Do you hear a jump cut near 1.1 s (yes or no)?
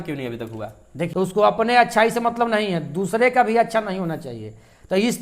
yes